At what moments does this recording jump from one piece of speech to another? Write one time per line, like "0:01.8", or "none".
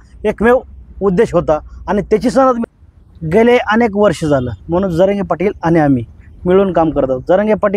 0:02.6